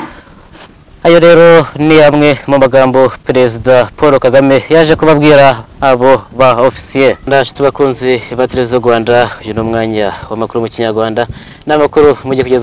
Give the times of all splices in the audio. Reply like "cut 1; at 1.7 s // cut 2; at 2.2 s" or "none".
cut 1; at 7.3 s